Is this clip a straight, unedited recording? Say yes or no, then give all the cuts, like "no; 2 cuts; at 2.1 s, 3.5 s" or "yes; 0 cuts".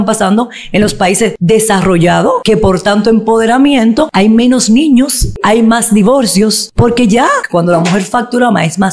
no; 6 cuts; at 1.4 s, 2.4 s, 4.1 s, 5.4 s, 6.6 s, 7.4 s